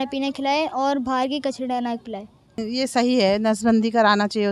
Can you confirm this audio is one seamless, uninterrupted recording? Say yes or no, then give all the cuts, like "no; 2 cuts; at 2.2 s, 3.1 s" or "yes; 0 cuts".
no; 1 cut; at 2.6 s